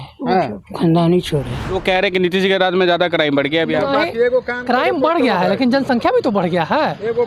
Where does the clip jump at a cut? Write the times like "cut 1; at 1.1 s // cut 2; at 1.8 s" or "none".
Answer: cut 1; at 1.6 s